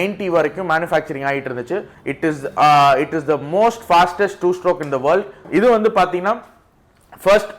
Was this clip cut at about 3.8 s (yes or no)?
no